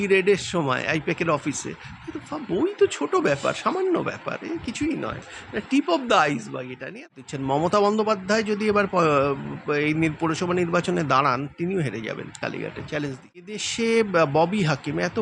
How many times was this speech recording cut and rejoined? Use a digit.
2